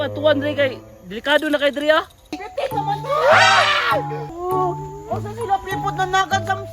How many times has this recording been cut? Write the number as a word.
two